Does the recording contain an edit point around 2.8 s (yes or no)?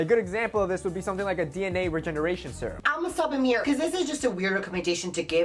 yes